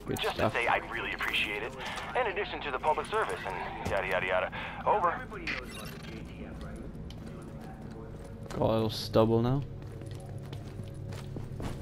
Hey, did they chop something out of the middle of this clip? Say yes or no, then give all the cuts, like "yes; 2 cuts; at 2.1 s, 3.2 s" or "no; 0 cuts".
no; 0 cuts